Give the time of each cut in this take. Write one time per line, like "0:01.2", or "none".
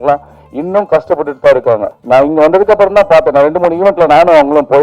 0:01.9